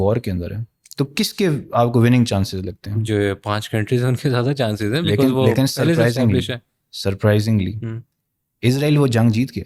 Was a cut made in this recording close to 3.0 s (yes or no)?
no